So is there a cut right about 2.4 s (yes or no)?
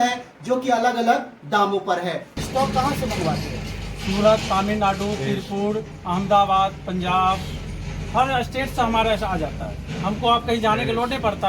yes